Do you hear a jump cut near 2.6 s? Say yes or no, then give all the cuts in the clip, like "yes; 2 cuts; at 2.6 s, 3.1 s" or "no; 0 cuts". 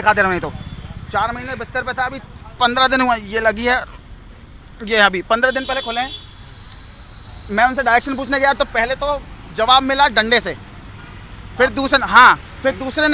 no; 0 cuts